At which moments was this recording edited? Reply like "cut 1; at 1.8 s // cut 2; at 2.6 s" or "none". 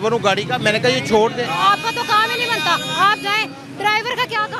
none